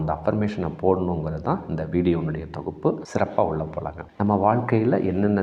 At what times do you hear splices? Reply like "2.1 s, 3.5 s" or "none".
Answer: none